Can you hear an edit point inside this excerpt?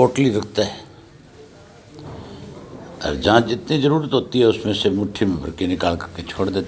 no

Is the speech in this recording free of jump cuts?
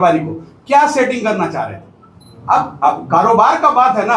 yes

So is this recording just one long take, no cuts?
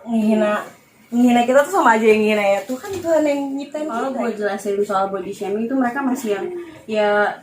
no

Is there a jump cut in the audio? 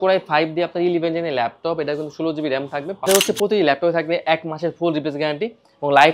yes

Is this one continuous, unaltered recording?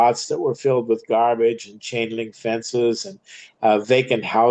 yes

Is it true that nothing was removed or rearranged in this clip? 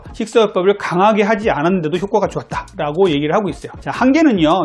no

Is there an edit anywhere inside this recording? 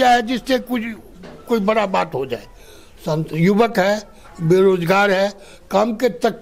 no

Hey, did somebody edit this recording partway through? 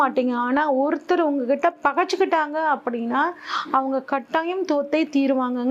no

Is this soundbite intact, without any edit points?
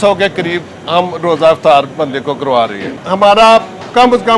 no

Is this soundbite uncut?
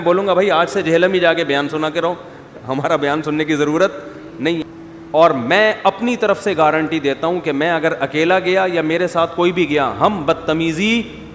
no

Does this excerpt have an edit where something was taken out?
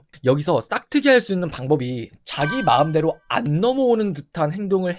no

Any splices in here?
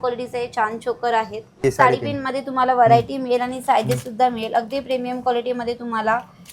yes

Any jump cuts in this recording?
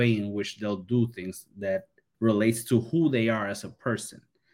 yes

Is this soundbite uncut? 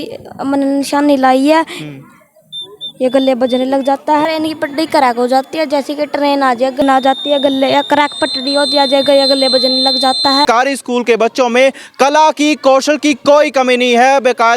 no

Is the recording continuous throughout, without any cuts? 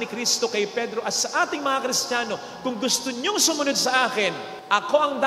yes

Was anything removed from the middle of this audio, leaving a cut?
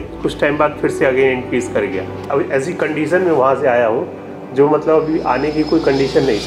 yes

